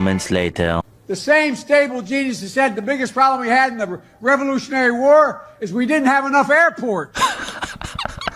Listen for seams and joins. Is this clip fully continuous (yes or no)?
yes